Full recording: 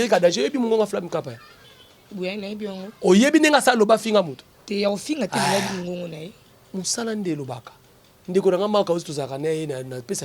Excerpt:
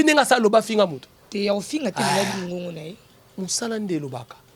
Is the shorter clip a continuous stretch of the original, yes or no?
yes